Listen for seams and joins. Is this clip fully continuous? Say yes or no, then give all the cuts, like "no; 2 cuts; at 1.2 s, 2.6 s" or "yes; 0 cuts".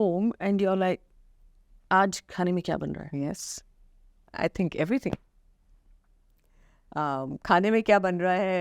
yes; 0 cuts